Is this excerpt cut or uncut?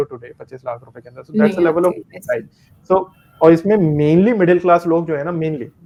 uncut